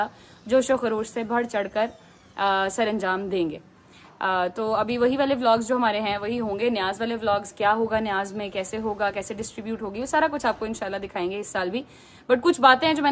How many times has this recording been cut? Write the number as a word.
zero